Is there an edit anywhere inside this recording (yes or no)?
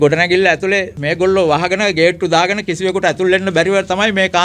yes